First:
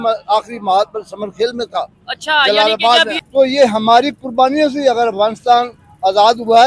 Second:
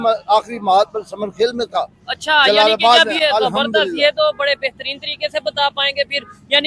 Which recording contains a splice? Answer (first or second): first